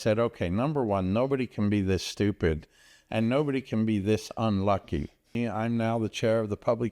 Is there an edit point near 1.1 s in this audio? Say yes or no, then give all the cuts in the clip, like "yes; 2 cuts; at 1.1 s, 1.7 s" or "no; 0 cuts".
no; 1 cut; at 5.3 s